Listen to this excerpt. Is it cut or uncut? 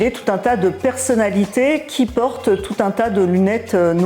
uncut